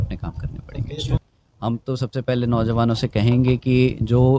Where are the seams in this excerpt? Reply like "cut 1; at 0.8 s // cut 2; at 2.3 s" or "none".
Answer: cut 1; at 1.2 s